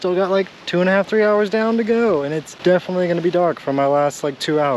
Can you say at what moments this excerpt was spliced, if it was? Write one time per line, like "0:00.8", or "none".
0:02.5